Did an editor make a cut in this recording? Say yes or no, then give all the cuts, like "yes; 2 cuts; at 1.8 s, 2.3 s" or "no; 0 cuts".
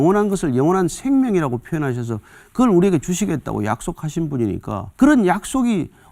yes; 1 cut; at 4.9 s